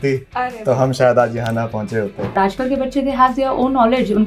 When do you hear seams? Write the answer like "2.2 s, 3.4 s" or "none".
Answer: 2.3 s